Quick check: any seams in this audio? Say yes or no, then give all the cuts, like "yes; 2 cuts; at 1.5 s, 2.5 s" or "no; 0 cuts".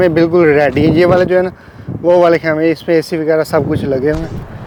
no; 0 cuts